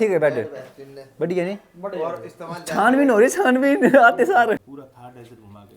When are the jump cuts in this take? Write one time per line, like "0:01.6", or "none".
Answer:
0:04.6